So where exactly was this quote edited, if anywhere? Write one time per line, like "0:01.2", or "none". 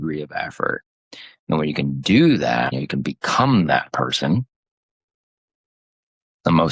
0:02.7

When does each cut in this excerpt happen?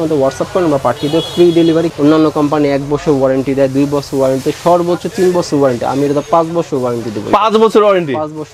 0:01.9

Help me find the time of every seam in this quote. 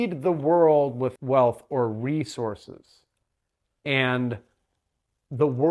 0:01.2

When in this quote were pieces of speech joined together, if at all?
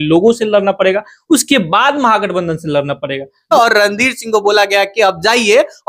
0:03.5

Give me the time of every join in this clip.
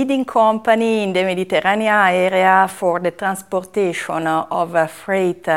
none

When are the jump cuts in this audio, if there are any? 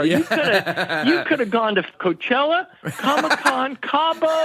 0:02.0

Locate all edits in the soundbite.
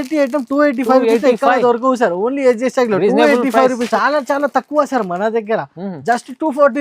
0:03.8

